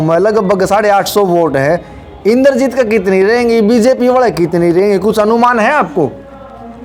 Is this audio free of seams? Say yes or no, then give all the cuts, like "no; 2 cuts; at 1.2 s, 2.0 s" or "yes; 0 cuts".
yes; 0 cuts